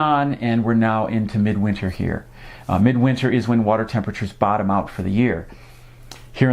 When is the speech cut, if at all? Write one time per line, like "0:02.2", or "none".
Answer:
0:04.9